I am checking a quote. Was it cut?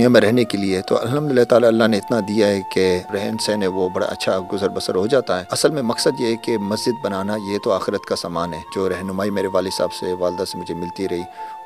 no; 0 cuts

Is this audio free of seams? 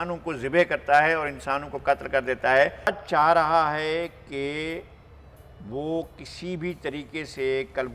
no; 1 cut; at 2.9 s

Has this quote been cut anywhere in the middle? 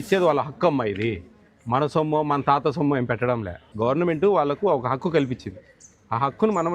yes; 1 cut; at 3.6 s

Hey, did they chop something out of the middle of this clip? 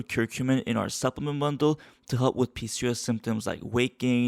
no; 0 cuts

